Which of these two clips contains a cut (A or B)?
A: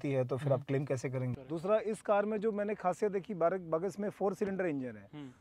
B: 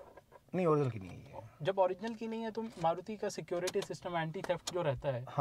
A